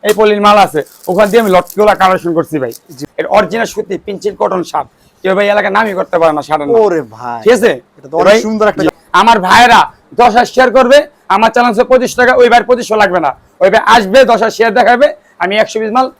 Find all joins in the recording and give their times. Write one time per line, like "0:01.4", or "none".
0:03.0
0:08.9